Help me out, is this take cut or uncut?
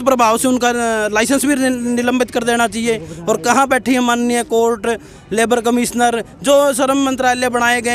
uncut